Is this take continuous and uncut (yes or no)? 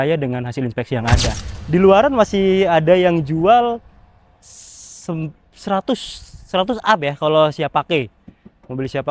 no